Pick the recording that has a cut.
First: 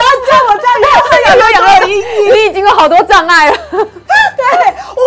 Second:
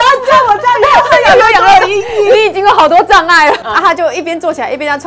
second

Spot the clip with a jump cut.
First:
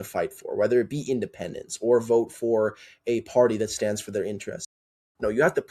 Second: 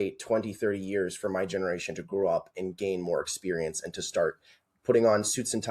first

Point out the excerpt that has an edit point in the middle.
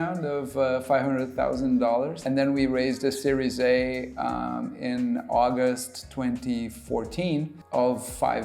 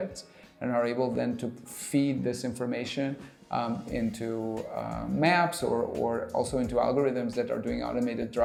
first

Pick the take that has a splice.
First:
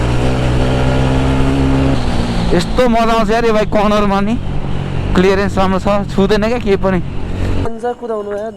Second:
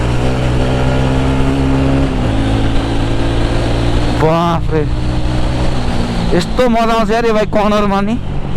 first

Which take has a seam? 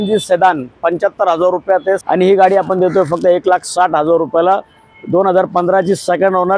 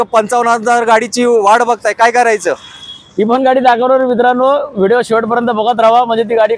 first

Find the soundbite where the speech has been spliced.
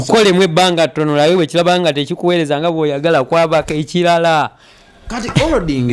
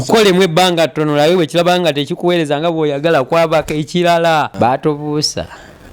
second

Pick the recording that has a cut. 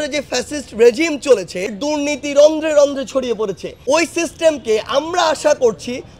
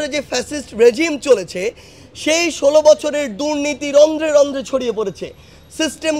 first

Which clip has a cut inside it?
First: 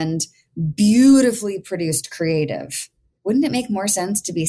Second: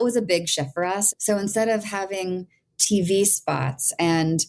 second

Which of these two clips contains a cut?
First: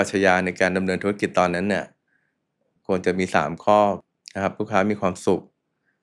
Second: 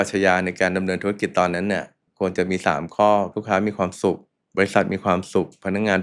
second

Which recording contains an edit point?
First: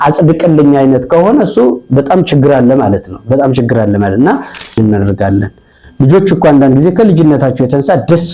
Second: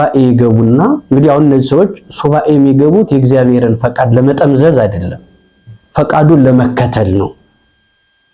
first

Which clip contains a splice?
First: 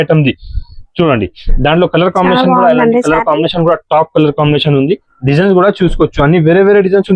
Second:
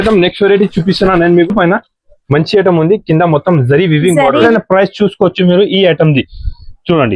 second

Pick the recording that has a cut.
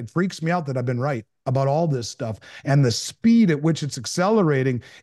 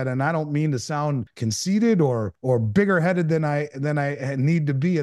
second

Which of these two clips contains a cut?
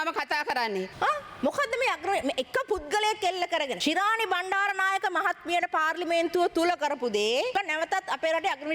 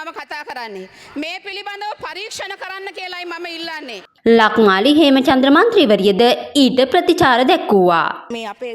first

